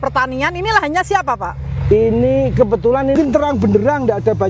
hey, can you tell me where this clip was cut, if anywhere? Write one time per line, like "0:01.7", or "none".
0:03.1